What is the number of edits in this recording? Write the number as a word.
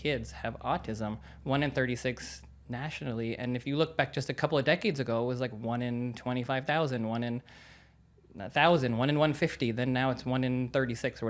zero